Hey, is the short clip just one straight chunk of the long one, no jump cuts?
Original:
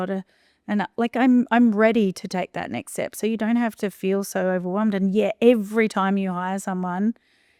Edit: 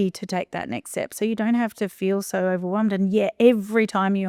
yes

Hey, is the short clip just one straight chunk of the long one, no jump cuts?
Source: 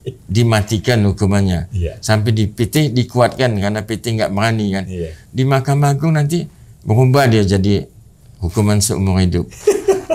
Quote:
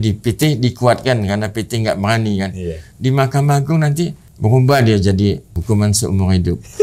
no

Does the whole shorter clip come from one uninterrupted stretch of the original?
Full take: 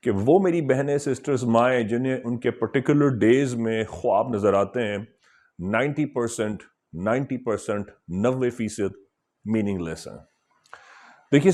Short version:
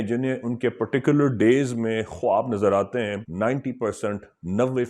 no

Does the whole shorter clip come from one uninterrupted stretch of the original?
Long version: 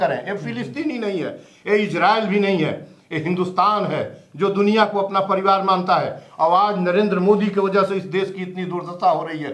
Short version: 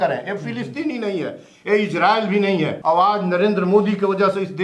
no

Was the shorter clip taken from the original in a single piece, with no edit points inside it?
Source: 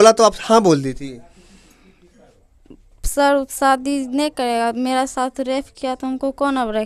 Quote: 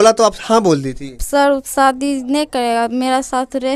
no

